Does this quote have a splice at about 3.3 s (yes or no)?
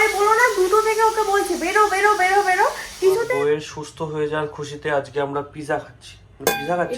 yes